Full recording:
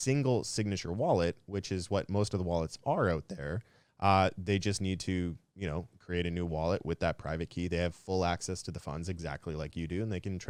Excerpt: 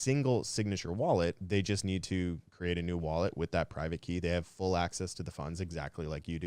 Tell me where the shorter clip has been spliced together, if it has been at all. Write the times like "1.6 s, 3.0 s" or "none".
1.4 s, 2.5 s